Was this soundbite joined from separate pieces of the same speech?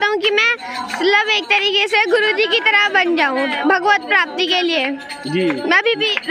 no; 0 cuts

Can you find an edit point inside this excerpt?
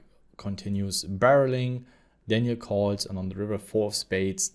no; 0 cuts

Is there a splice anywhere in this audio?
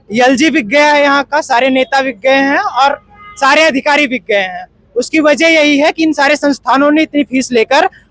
no; 0 cuts

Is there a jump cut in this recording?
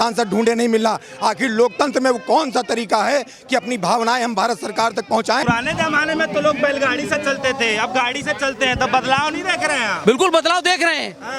yes; 1 cut; at 5.4 s

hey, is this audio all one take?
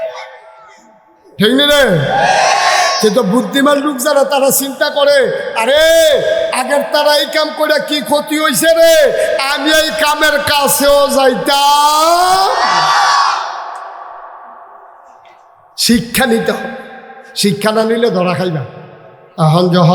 yes; 0 cuts

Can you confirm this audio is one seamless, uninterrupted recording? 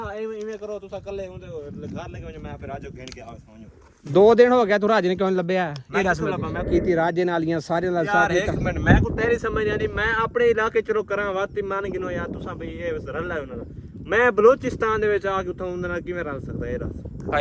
no; 1 cut; at 6.7 s

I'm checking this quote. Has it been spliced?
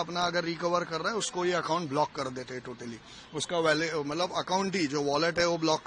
no; 0 cuts

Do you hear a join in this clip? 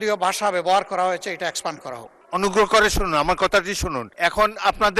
yes; 2 cuts; at 2.1 s, 4.0 s

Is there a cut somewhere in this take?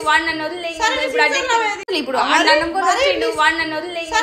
yes; 1 cut; at 1.9 s

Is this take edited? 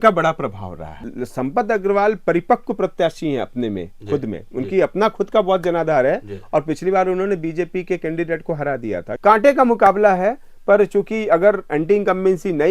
yes; 2 cuts; at 1.1 s, 9.1 s

